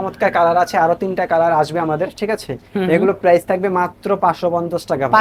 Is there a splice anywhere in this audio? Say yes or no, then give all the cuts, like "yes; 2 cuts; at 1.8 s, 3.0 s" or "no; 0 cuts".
no; 0 cuts